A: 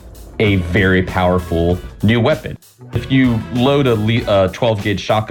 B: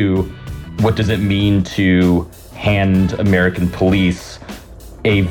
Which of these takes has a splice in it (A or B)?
A